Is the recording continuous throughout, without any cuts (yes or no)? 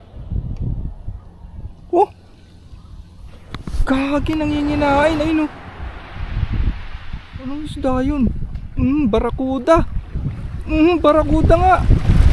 yes